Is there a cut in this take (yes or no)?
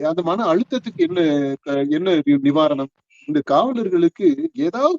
yes